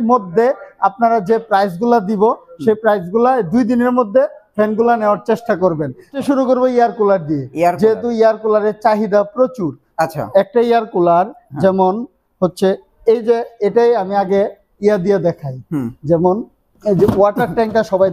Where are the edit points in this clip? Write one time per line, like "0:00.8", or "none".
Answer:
none